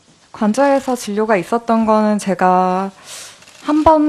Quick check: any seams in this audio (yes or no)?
yes